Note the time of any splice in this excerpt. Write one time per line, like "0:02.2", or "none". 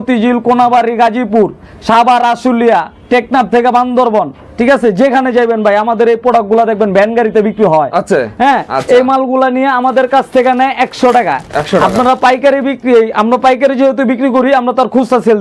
none